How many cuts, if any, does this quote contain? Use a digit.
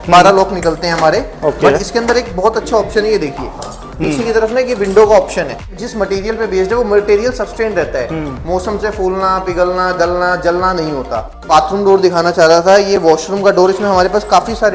2